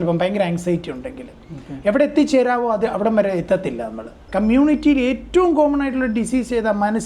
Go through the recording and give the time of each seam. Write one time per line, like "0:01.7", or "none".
0:04.2